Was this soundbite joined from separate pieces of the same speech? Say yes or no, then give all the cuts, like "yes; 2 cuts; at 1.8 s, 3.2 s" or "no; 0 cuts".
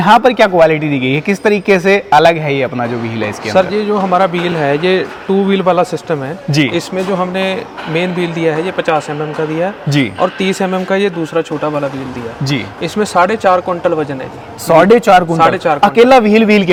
no; 0 cuts